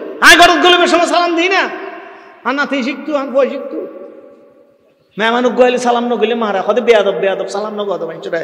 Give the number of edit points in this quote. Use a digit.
0